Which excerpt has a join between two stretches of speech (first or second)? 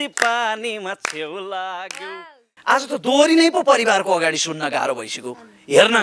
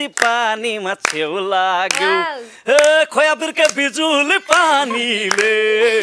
first